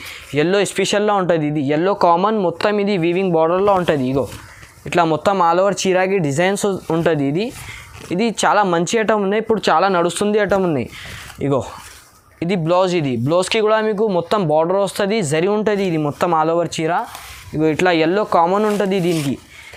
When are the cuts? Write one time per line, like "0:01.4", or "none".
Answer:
none